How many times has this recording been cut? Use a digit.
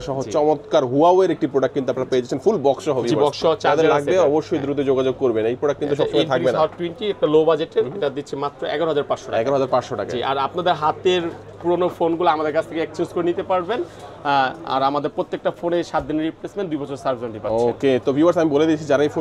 0